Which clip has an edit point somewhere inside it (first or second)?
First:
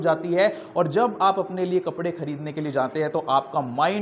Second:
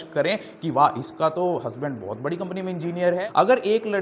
second